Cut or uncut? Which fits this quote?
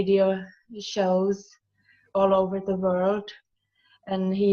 cut